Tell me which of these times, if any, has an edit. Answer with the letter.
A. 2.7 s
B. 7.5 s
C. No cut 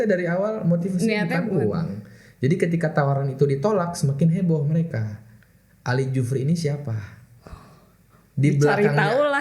C